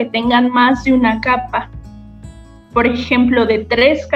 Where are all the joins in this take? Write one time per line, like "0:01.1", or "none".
none